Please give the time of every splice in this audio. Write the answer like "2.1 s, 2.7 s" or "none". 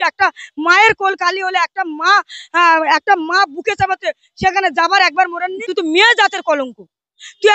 5.5 s